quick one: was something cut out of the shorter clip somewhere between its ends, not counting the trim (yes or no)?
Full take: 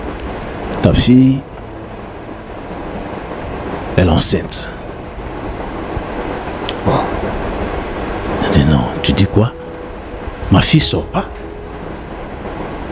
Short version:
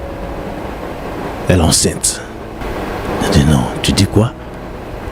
yes